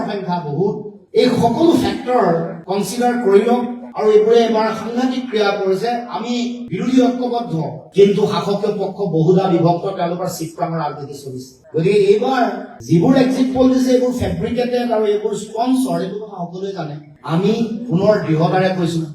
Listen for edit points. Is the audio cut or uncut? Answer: uncut